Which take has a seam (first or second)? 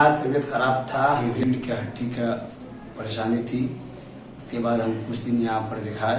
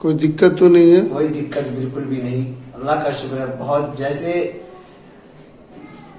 first